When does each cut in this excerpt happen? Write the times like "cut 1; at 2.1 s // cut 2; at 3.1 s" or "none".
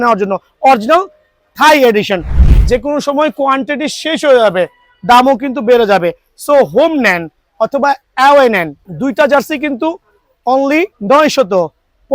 cut 1; at 2.3 s // cut 2; at 8.8 s // cut 3; at 11.0 s